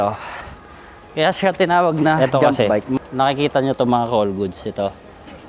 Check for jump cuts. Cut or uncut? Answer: cut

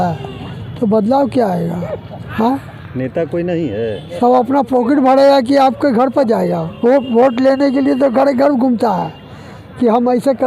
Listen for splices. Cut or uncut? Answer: cut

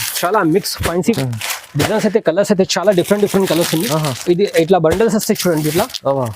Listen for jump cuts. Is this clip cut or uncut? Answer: cut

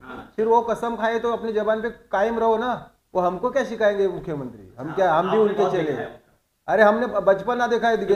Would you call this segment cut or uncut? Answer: cut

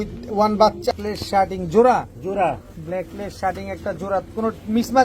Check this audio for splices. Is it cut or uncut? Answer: cut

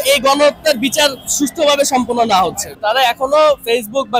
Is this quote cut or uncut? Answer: cut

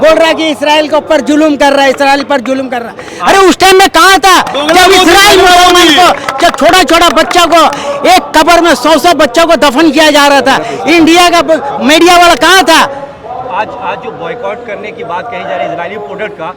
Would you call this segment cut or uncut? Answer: uncut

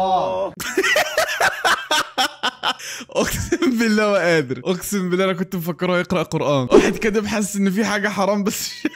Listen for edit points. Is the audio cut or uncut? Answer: cut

